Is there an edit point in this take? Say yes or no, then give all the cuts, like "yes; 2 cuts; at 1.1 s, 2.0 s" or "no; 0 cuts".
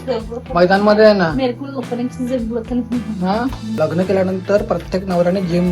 yes; 1 cut; at 3.7 s